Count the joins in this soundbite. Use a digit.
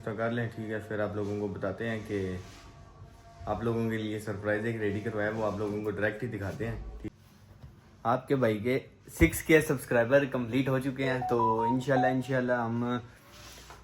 1